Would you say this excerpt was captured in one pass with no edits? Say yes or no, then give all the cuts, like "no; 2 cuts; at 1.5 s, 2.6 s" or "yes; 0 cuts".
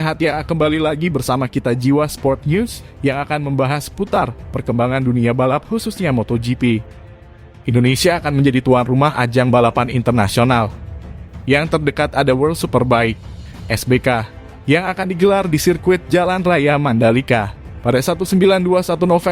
no; 1 cut; at 7.5 s